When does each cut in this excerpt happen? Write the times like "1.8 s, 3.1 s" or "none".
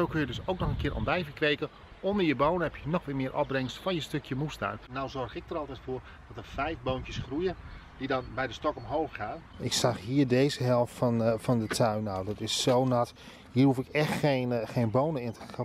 4.8 s, 9.5 s